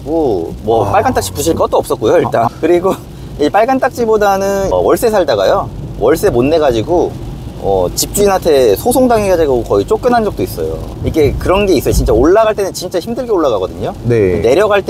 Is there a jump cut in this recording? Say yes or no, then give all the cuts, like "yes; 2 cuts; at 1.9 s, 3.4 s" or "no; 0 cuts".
yes; 3 cuts; at 2.5 s, 4.7 s, 10.9 s